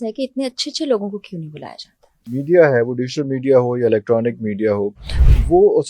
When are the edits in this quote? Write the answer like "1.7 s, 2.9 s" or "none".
2.3 s

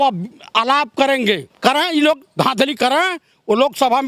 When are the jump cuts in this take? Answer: 1.5 s

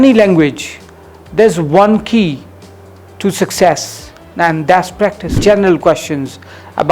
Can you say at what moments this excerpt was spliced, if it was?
5.4 s

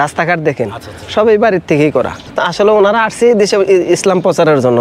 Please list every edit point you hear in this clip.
2.2 s

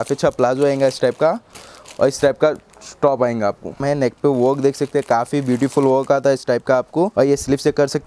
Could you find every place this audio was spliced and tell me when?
3.8 s, 7.1 s

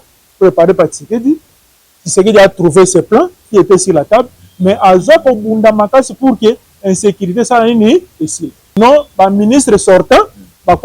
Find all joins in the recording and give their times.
8.8 s

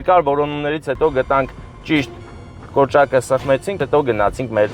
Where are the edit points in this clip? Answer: 3.8 s

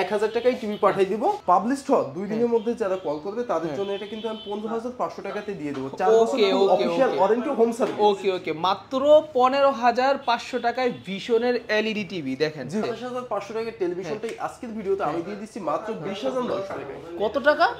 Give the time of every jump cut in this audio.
1.4 s, 12.8 s

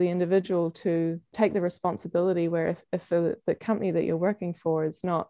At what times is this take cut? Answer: 1.3 s

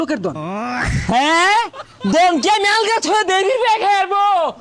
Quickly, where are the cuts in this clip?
none

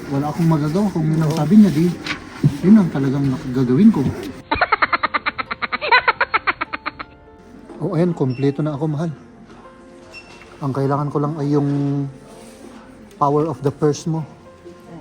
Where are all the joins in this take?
4.4 s, 7.4 s

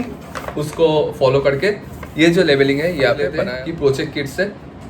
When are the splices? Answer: 3.3 s

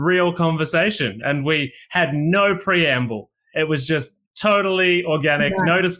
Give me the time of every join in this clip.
none

